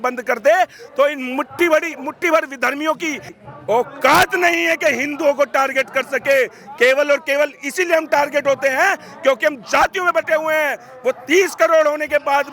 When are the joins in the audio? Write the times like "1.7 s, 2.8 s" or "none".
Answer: none